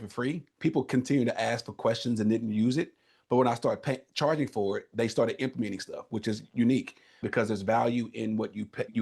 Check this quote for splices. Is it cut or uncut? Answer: cut